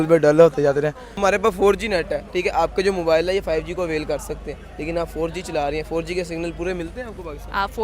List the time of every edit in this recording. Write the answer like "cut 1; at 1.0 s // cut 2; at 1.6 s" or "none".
cut 1; at 1.1 s